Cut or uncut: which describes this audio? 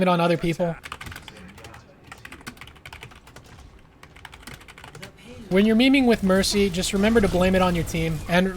cut